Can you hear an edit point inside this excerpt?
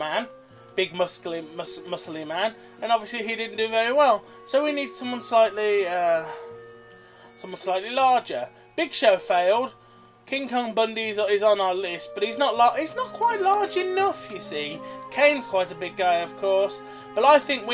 yes; 1 cut; at 10.2 s

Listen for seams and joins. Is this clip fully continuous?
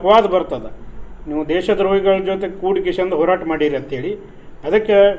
yes; 0 cuts

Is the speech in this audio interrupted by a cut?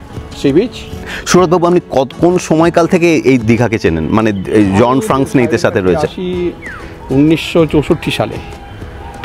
yes; 1 cut; at 1.2 s

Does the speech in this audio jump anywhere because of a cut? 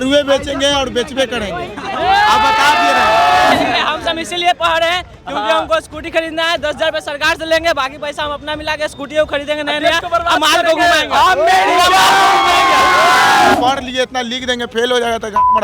yes; 2 cuts; at 3.5 s, 13.5 s

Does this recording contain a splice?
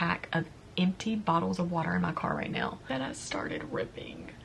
yes; 1 cut; at 2.8 s

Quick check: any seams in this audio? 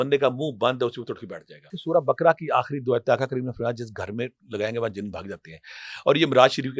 yes; 1 cut; at 1.8 s

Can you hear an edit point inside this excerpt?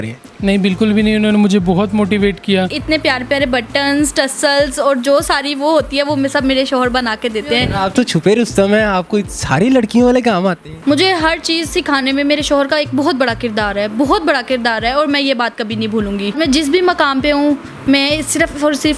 yes; 4 cuts; at 2.8 s, 7.7 s, 10.7 s, 16.3 s

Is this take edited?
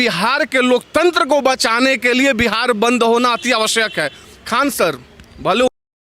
no; 0 cuts

